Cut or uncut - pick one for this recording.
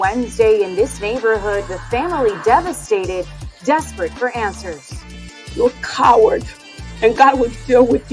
uncut